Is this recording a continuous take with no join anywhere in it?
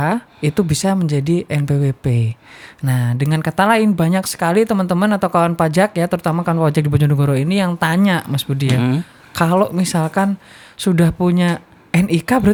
yes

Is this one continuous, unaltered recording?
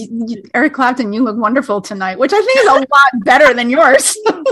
yes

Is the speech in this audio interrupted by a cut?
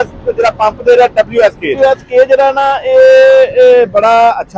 yes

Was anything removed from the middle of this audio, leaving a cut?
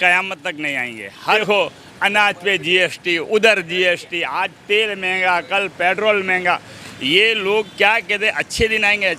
yes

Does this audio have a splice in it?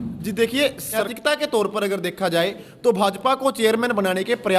yes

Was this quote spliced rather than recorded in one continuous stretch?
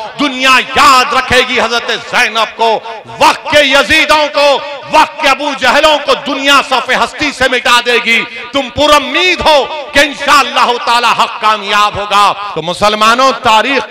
yes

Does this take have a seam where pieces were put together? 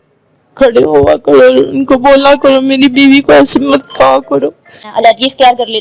yes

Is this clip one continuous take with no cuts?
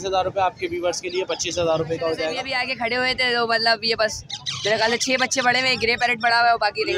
no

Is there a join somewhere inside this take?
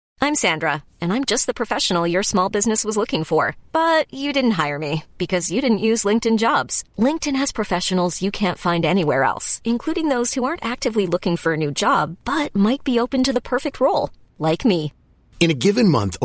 no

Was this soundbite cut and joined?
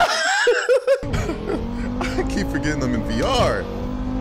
yes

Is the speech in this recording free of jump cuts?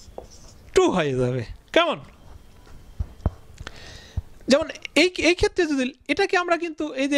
yes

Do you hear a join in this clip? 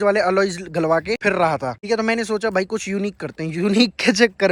no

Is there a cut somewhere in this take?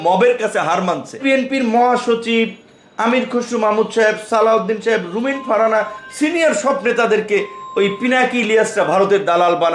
yes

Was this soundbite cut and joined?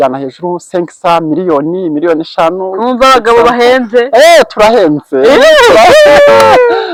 no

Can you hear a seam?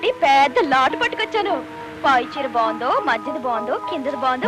no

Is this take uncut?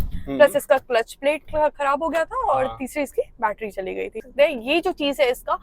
no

